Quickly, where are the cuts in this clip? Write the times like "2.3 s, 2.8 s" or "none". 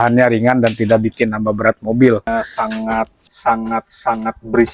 2.3 s